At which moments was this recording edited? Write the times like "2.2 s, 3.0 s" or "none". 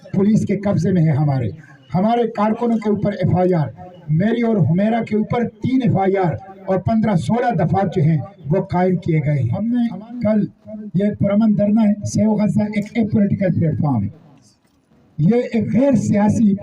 9.5 s